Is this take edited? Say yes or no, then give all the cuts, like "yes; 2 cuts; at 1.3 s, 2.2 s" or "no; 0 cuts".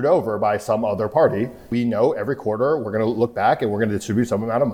yes; 1 cut; at 1.7 s